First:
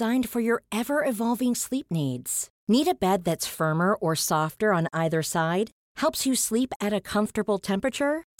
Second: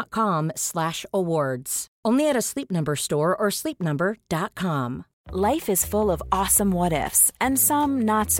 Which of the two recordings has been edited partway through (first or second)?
second